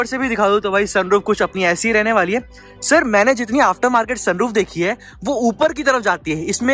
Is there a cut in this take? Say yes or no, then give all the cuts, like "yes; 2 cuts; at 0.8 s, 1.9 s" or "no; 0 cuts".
no; 0 cuts